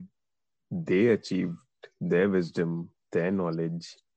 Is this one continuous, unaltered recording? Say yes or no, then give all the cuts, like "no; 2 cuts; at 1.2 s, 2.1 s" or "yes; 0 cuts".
yes; 0 cuts